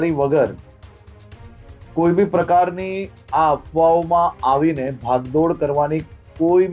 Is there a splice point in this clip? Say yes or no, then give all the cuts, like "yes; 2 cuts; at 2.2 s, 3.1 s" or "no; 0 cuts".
no; 0 cuts